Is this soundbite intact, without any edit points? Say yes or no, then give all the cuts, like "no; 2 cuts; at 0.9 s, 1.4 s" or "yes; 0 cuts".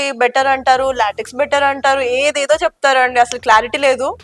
yes; 0 cuts